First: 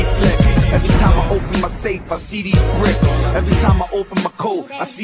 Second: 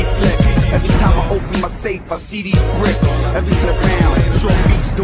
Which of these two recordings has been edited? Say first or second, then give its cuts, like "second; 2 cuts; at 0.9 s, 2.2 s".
first; 1 cut; at 3.6 s